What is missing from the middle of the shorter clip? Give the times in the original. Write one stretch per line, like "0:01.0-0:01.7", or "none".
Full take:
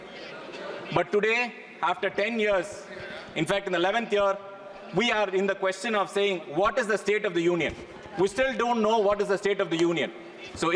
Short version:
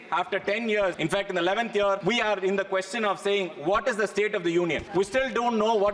0:02.7-0:03.3
0:04.4-0:04.9
0:07.7-0:08.1